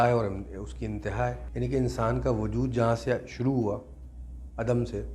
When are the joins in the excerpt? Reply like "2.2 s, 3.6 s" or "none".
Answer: 1.4 s